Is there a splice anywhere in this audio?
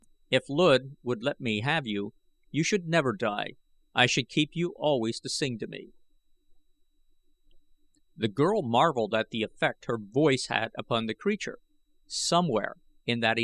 yes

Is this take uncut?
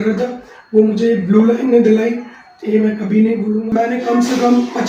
no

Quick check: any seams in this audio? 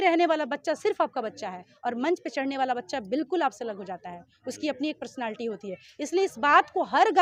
no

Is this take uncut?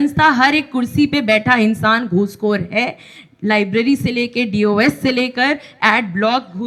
yes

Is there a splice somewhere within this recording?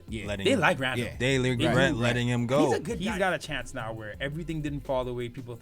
yes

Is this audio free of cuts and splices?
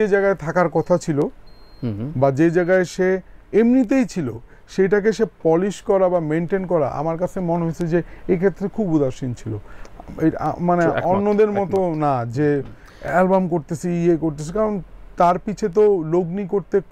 yes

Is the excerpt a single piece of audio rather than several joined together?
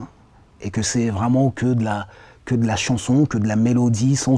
yes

